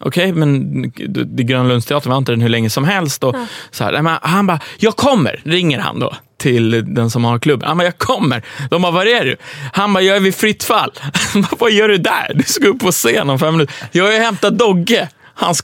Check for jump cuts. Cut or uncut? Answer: uncut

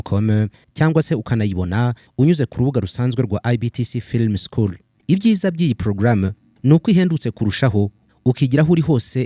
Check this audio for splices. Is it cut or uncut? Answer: uncut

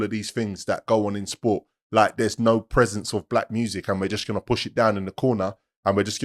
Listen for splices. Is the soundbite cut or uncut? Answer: uncut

